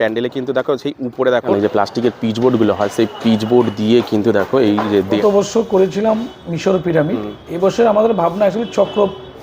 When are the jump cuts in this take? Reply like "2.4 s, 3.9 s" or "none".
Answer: 1.5 s, 5.2 s